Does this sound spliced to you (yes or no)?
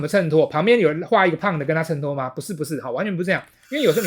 no